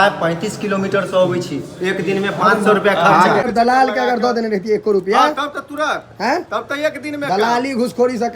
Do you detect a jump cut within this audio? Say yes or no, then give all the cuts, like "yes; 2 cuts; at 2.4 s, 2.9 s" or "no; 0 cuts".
yes; 1 cut; at 3.4 s